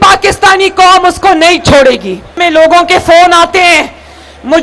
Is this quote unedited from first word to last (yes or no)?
no